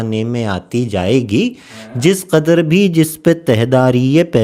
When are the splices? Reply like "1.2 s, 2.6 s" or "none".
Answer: none